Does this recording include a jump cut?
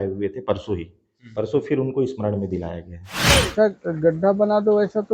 yes; 1 cut; at 3.5 s

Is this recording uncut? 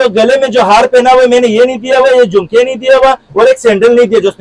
yes; 0 cuts

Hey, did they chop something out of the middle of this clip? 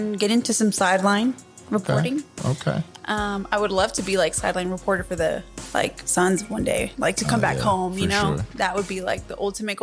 no; 0 cuts

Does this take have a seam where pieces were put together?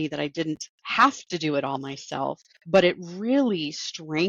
yes; 1 cut; at 2.5 s

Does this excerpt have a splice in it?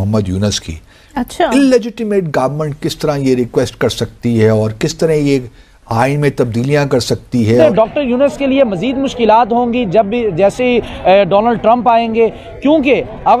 yes; 1 cut; at 7.6 s

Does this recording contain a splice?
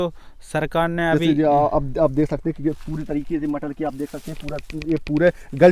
no; 0 cuts

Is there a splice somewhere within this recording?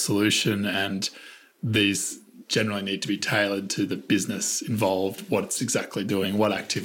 no; 0 cuts

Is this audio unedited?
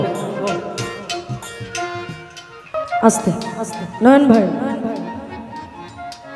no; 1 cut; at 2.8 s

